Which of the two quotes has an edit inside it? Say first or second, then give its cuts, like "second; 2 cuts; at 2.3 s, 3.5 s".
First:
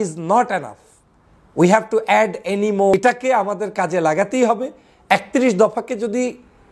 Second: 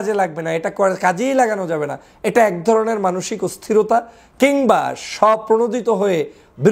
first; 1 cut; at 2.9 s